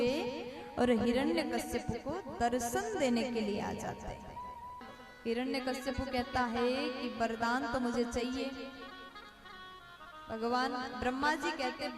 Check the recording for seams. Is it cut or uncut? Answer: cut